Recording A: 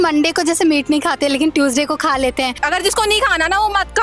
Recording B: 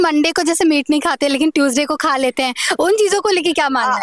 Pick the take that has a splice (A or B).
A